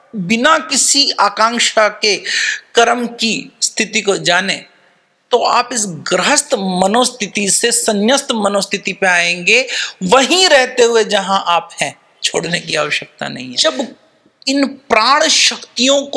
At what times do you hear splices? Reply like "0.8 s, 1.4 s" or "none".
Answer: 13.4 s